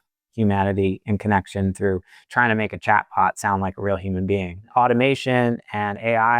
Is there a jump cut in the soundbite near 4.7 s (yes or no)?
yes